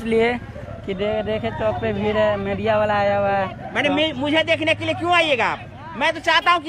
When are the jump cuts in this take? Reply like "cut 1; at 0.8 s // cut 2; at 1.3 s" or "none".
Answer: none